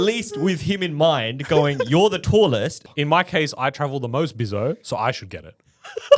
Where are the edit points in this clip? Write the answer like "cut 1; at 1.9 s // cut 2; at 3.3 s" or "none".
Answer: cut 1; at 2.8 s